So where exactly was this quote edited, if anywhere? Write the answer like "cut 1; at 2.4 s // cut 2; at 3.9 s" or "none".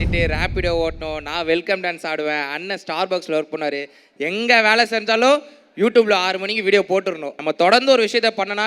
cut 1; at 7.3 s